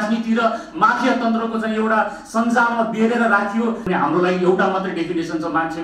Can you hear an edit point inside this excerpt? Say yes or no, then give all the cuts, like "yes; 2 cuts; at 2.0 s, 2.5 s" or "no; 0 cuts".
yes; 1 cut; at 3.9 s